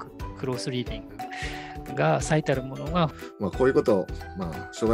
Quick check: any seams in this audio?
yes; 1 cut; at 3.2 s

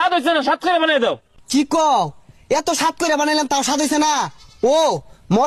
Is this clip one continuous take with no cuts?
yes; 0 cuts

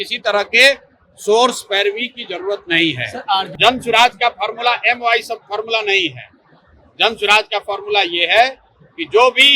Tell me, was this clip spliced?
yes; 1 cut; at 3.5 s

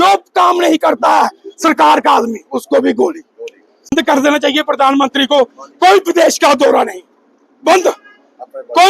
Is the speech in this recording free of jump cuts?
no; 1 cut; at 3.9 s

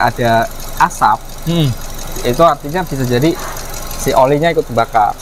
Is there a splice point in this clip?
no; 0 cuts

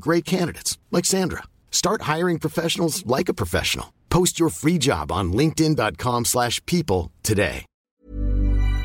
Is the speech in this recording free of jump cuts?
no; 1 cut; at 7.8 s

